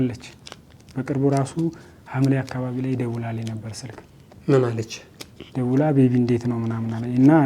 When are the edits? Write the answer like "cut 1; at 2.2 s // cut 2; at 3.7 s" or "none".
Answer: none